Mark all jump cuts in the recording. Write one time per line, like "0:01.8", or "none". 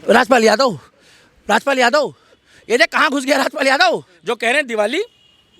0:04.1